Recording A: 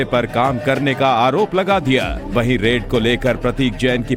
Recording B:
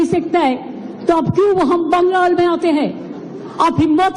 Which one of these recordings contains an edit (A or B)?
B